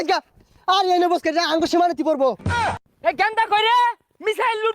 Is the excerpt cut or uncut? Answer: cut